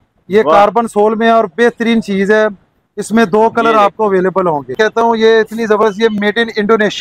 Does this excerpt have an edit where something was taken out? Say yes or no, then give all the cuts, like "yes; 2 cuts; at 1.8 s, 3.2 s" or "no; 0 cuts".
yes; 1 cut; at 4.7 s